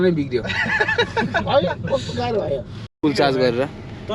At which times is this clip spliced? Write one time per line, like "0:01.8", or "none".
0:02.8